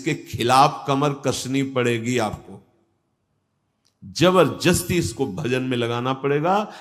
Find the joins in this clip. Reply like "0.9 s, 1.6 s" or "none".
none

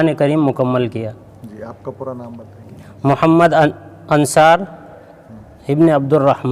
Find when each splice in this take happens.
none

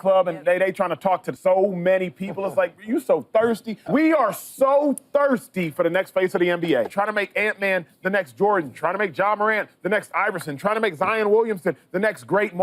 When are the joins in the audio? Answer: 1.3 s, 3.7 s, 6.9 s

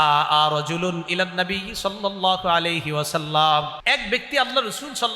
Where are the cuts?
3.8 s

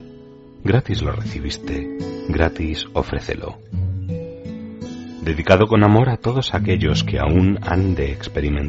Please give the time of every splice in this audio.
3.6 s, 5.2 s

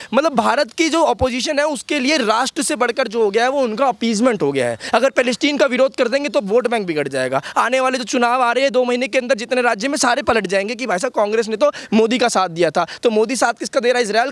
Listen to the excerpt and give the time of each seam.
none

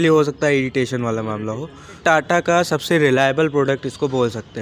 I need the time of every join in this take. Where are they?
2.0 s

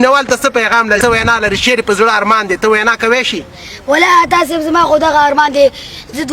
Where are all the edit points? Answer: 1.0 s

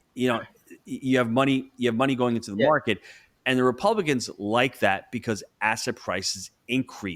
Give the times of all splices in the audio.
none

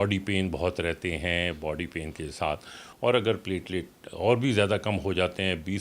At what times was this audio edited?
2.8 s

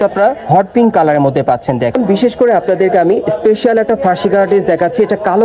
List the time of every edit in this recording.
2.0 s

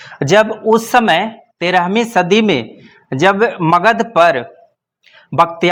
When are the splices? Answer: none

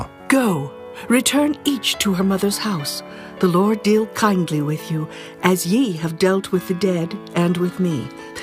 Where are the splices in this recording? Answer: 4.8 s

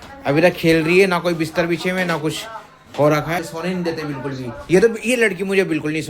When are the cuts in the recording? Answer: 3.4 s

